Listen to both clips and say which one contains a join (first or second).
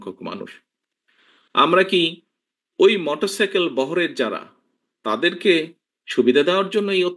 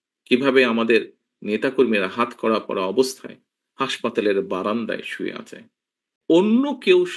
second